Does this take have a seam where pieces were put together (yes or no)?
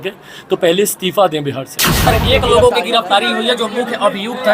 yes